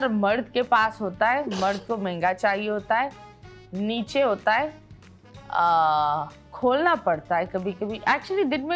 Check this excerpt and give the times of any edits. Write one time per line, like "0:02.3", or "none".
none

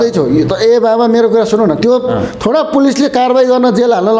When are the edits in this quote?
none

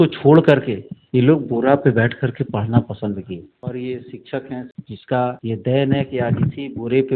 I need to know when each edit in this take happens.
0:03.6

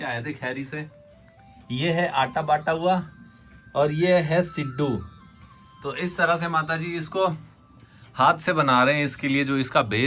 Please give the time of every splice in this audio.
none

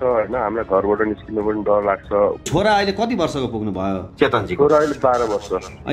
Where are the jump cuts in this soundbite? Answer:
0:02.5

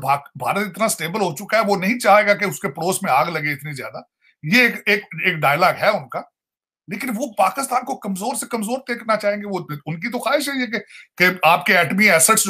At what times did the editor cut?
none

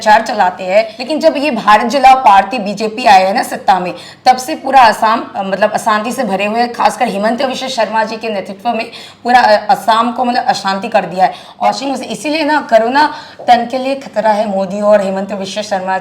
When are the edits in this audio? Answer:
0:01.0
0:11.4

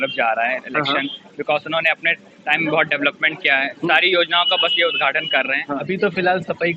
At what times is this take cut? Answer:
0:05.8

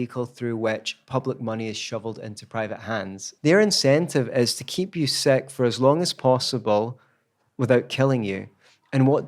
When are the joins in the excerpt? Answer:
0:03.2

